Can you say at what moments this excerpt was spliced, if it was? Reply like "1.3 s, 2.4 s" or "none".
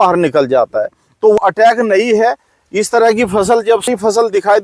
1.4 s, 3.9 s